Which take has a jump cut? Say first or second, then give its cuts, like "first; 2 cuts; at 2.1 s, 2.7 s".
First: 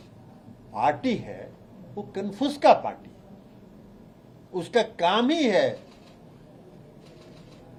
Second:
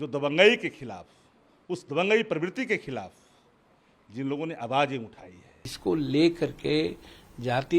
second; 1 cut; at 5.8 s